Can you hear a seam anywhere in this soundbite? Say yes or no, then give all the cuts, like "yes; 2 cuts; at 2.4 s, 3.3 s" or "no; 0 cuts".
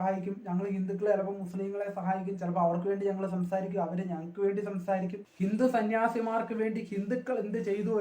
yes; 1 cut; at 5.2 s